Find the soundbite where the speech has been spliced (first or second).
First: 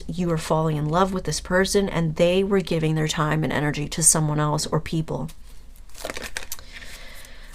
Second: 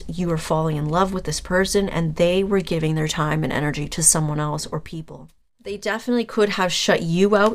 second